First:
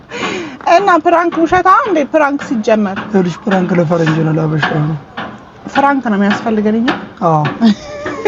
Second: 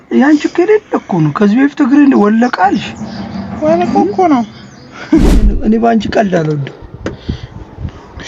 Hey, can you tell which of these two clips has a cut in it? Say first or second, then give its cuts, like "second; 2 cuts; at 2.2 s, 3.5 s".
second; 1 cut; at 5.6 s